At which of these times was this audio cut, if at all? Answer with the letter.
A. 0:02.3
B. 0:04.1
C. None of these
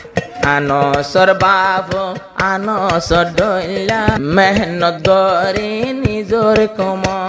B